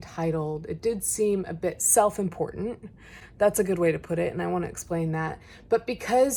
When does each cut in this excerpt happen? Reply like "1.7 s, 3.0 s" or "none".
none